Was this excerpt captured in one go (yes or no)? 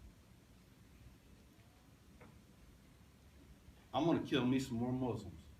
yes